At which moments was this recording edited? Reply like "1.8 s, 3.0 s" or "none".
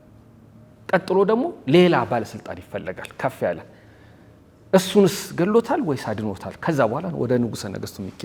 none